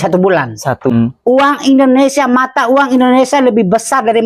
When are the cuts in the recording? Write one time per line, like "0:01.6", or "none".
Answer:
0:00.9

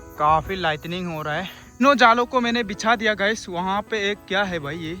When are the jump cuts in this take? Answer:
0:01.8

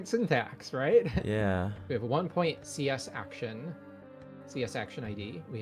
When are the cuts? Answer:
none

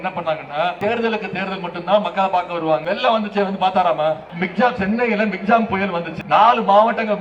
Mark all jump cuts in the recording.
0:00.8
0:02.8
0:04.3
0:06.1

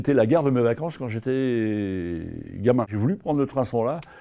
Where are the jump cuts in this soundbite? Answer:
0:02.9

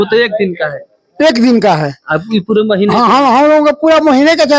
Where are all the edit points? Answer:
none

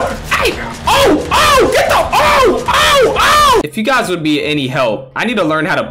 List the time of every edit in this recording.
0:03.7

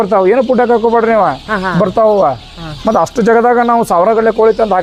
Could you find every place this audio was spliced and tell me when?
none

